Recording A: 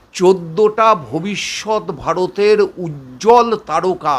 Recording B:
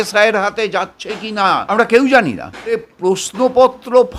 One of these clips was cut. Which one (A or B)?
B